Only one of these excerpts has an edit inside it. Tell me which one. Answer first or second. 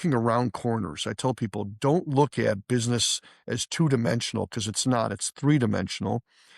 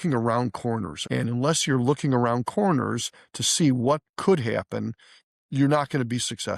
second